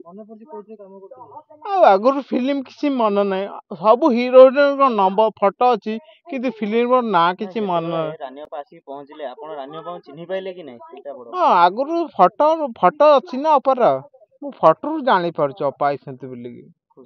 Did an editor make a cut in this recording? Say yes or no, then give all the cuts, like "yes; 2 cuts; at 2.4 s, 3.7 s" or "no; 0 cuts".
no; 0 cuts